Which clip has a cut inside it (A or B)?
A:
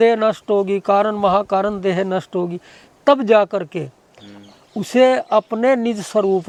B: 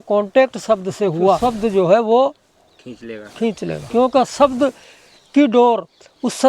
B